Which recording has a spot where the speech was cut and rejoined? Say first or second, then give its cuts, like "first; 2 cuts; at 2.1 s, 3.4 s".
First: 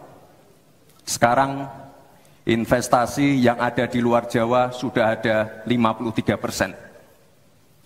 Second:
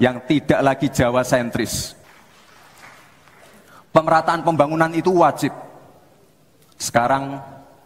second; 1 cut; at 2.0 s